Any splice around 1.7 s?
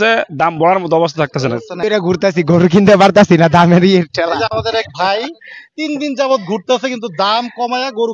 yes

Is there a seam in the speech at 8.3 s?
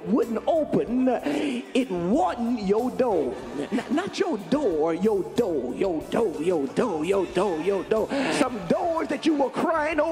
yes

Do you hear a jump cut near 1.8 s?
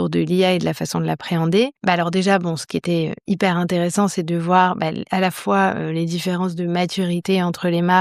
yes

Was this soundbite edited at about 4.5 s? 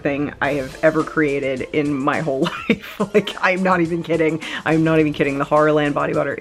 no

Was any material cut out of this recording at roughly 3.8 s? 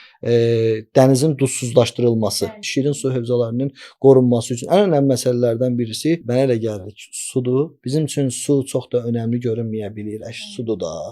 no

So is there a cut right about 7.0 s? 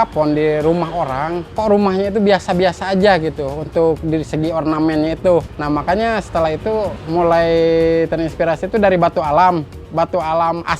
yes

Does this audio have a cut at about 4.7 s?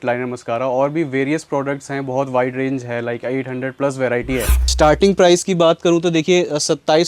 yes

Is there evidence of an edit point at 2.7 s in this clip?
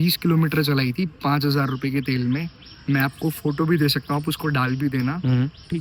no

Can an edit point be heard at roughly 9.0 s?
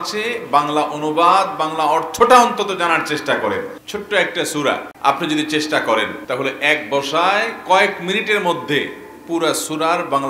no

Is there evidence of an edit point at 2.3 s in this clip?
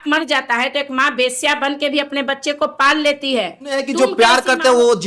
no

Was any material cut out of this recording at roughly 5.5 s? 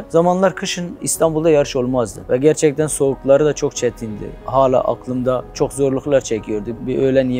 yes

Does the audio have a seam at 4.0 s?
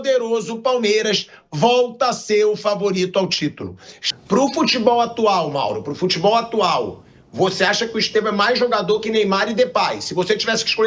yes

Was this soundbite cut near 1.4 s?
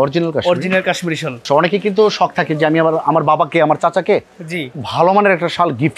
yes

